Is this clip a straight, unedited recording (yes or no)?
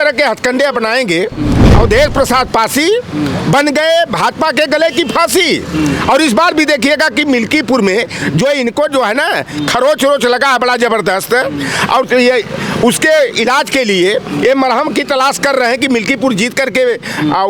no